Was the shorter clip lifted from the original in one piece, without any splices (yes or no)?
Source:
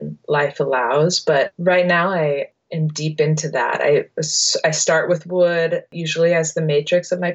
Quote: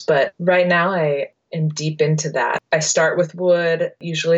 no